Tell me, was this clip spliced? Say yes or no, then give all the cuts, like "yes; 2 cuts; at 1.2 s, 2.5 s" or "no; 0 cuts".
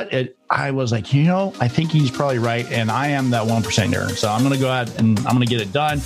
no; 0 cuts